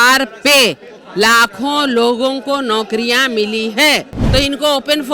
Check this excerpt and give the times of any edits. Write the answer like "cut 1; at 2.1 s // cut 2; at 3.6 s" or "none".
cut 1; at 4.2 s